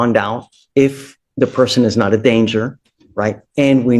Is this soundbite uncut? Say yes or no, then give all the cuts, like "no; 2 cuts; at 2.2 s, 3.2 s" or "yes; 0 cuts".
yes; 0 cuts